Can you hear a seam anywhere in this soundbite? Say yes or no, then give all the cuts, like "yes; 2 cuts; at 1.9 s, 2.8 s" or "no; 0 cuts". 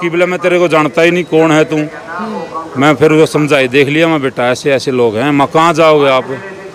no; 0 cuts